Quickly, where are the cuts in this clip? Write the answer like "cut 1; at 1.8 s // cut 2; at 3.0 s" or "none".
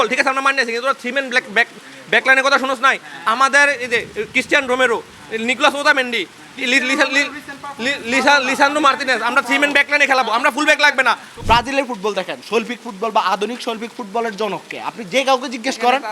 cut 1; at 11.3 s